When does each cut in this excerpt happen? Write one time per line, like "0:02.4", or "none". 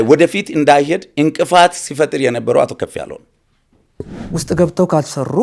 0:04.1